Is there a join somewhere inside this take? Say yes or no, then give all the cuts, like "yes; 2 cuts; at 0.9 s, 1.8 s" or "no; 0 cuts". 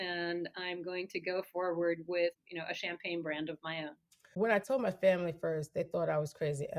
yes; 2 cuts; at 2.3 s, 4.2 s